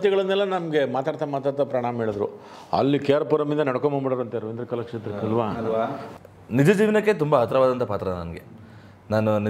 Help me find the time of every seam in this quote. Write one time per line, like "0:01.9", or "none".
0:06.0